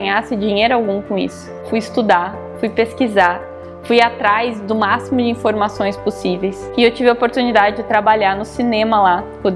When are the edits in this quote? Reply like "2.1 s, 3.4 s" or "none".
1.6 s, 6.6 s